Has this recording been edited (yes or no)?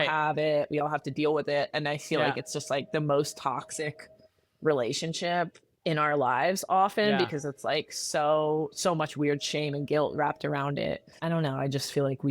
yes